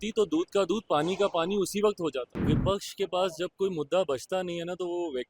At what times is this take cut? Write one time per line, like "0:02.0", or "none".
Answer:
0:02.3

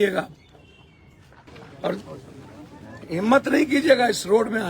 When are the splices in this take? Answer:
0:01.5

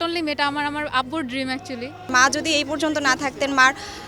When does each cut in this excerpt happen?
0:02.2

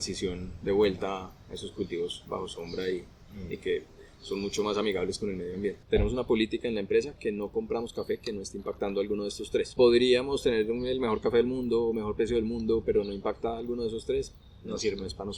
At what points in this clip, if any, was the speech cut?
0:05.8
0:09.7

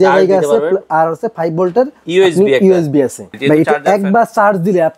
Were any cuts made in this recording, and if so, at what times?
0:02.0
0:03.3

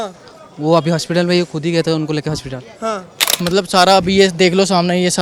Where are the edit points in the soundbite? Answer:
0:03.3

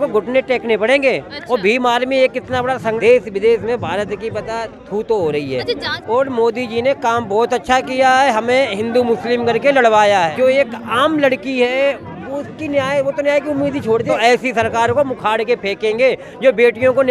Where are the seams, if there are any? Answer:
0:03.0
0:06.1
0:10.3
0:14.1

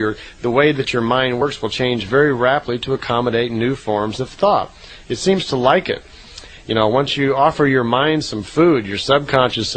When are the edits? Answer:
0:07.2

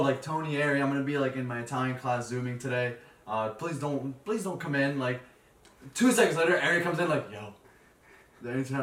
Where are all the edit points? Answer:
none

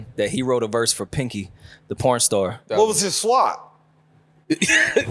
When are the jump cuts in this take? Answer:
0:02.6

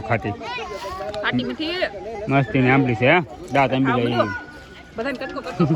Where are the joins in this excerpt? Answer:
none

